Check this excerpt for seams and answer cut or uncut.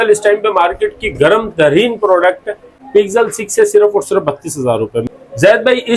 cut